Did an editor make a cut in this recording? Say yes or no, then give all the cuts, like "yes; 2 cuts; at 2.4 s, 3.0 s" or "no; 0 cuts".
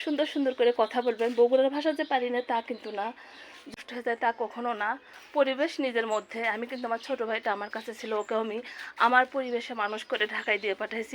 yes; 1 cut; at 3.7 s